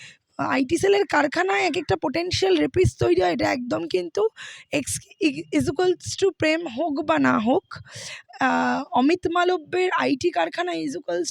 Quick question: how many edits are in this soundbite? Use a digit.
0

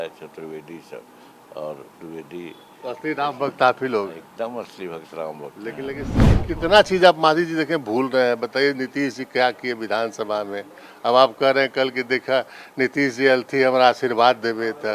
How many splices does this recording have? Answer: 1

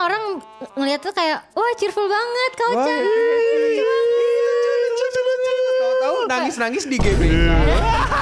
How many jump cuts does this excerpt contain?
0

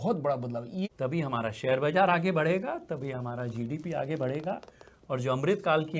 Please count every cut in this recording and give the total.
1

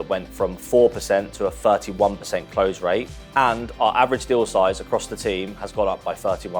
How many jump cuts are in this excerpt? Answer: 0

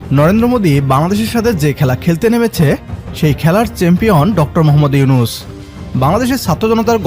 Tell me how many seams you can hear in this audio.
0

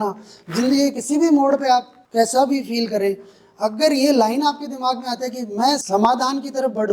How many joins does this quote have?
2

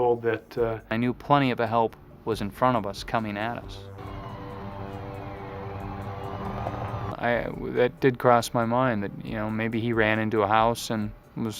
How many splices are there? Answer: 0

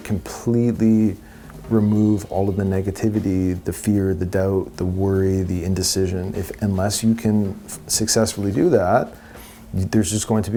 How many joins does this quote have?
0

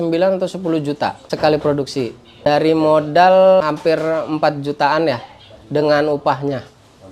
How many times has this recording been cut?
3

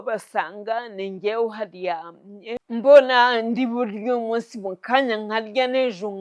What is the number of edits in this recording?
1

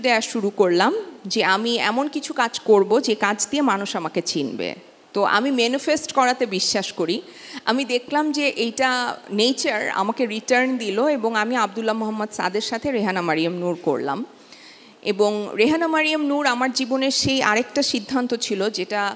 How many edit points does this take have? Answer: 0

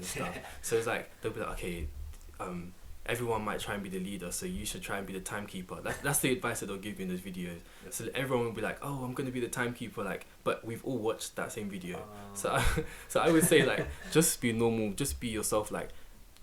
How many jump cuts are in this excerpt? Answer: 0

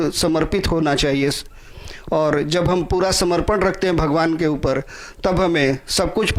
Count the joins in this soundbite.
0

